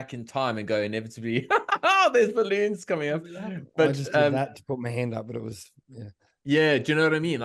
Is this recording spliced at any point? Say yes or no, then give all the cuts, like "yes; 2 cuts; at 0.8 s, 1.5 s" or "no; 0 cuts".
no; 0 cuts